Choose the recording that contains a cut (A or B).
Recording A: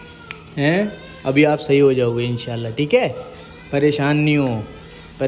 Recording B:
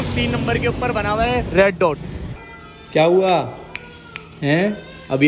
B